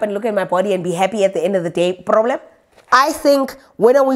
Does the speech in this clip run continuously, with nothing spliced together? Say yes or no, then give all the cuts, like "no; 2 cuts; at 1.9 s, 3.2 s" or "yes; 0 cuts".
no; 1 cut; at 2.7 s